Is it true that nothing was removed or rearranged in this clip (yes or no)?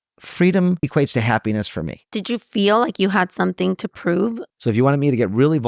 no